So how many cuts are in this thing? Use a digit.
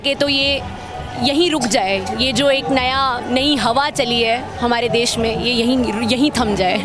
0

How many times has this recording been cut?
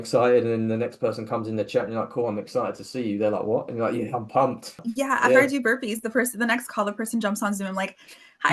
1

